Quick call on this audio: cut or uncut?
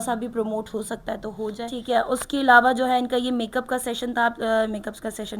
cut